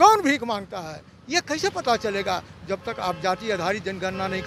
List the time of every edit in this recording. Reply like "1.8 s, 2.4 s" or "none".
none